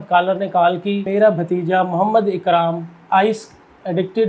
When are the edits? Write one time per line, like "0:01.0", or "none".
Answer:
0:01.1